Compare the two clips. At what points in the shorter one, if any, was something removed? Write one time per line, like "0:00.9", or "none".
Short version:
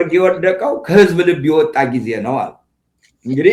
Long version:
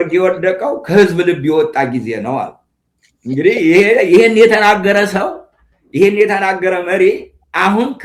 none